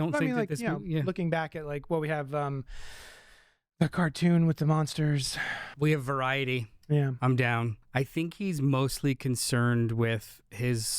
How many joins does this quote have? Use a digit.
2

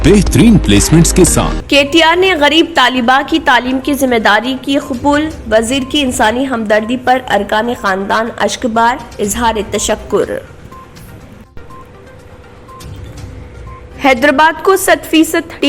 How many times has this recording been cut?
1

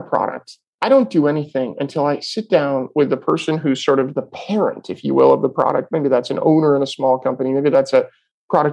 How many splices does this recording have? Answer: 1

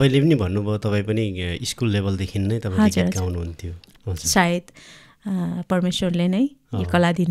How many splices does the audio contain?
1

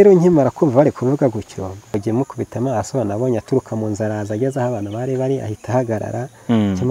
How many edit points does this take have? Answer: 1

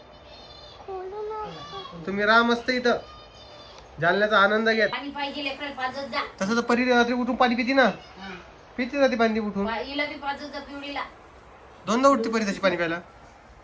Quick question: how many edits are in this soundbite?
1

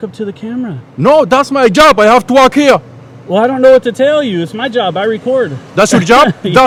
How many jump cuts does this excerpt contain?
0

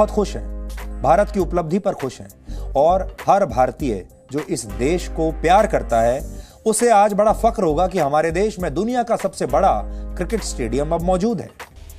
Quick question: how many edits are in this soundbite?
0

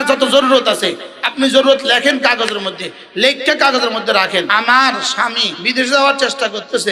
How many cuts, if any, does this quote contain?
0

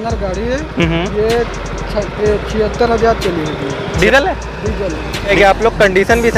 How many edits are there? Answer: 2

